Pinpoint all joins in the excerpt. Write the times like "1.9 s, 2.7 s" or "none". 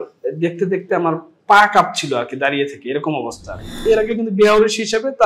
3.8 s